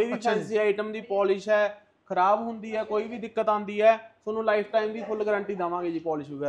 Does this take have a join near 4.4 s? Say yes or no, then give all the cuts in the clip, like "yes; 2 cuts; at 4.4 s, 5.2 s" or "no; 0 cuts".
no; 0 cuts